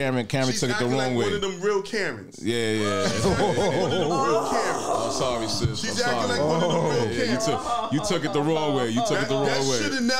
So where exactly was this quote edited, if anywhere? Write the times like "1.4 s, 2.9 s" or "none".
none

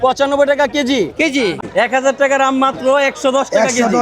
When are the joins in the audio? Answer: 1.6 s

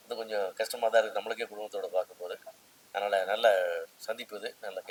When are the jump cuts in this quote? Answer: none

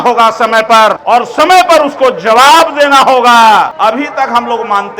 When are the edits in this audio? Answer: 1.0 s, 3.7 s

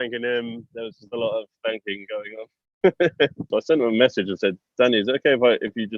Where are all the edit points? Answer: 3.4 s

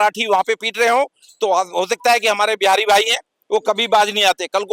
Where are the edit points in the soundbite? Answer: none

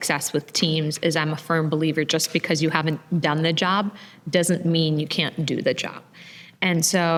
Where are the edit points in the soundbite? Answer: none

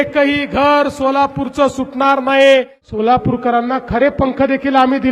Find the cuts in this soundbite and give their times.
2.8 s

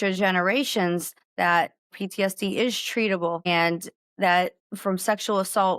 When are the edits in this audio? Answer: 1.2 s, 1.9 s, 3.4 s, 4.7 s

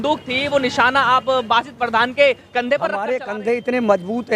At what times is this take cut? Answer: 3.2 s

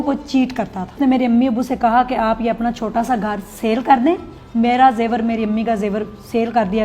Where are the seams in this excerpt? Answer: 0.9 s, 4.3 s

